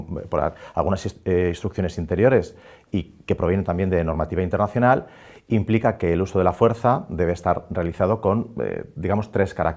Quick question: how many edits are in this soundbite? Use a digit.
1